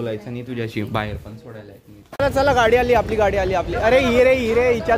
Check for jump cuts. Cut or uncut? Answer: cut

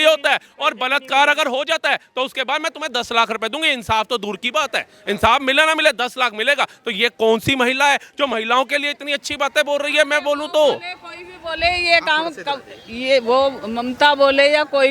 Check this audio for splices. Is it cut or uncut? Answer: uncut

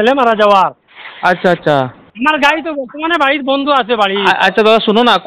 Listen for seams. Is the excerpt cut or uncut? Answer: cut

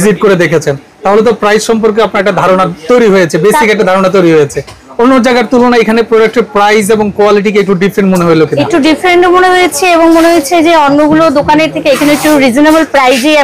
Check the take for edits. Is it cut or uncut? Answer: uncut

